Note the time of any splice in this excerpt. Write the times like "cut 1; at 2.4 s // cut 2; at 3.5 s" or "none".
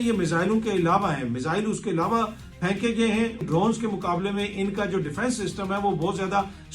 cut 1; at 3.4 s